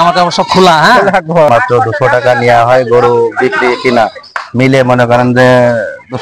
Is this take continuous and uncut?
no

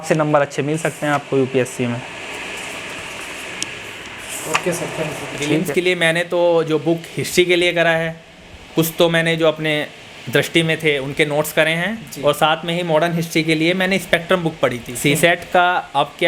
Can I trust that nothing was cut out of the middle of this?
no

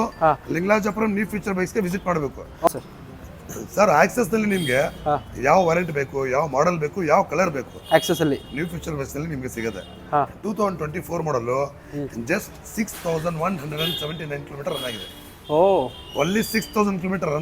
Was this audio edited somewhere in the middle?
yes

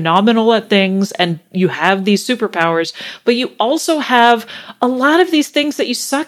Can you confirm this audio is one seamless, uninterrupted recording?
yes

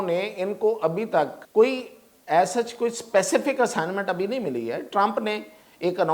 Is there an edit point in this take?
yes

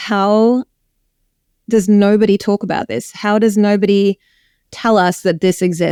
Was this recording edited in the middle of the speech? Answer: no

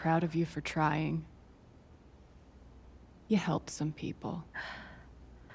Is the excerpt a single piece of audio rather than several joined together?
no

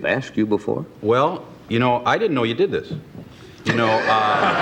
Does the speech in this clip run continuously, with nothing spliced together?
yes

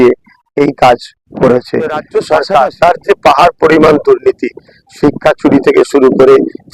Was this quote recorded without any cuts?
no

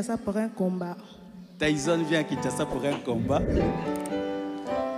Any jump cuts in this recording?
yes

